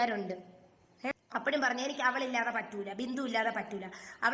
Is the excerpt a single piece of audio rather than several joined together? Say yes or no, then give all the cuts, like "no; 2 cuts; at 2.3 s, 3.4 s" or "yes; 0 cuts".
no; 1 cut; at 1.1 s